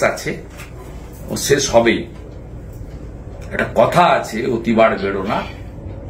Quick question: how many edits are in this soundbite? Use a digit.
0